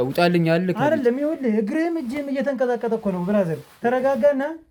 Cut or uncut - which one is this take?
uncut